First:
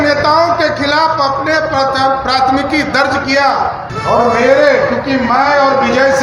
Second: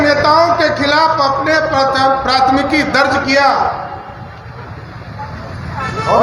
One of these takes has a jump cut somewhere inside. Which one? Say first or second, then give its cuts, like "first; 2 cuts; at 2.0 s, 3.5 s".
first; 1 cut; at 3.9 s